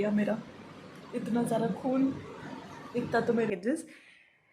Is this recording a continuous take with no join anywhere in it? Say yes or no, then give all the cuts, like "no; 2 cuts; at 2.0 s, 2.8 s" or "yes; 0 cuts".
no; 1 cut; at 3.5 s